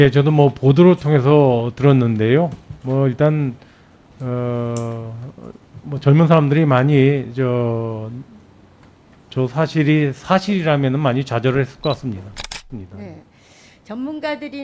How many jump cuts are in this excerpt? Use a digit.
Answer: 1